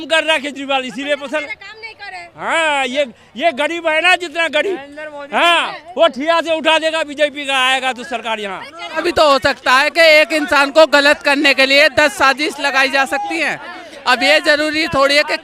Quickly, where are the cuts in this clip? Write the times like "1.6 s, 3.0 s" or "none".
9.0 s